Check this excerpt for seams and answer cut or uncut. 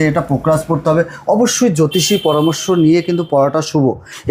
uncut